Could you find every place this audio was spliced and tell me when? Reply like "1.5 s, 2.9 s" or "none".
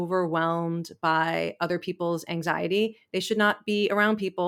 none